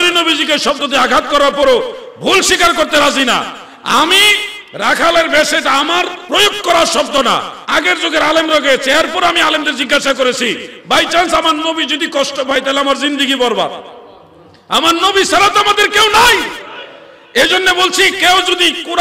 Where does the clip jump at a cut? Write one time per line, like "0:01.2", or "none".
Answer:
0:06.2
0:07.6